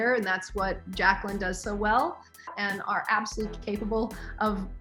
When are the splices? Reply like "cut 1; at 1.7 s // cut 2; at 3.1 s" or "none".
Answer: cut 1; at 2.6 s